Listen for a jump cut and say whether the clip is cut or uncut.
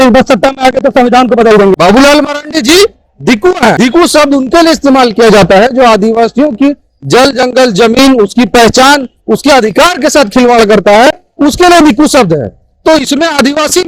cut